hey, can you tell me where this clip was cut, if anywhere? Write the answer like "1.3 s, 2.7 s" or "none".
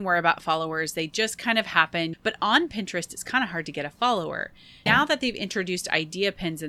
2.2 s, 4.9 s